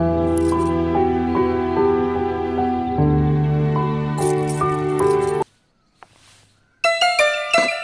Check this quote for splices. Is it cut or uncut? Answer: cut